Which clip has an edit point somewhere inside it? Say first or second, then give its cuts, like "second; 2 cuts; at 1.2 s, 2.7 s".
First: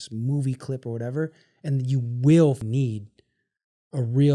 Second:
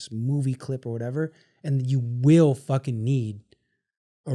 first; 1 cut; at 2.6 s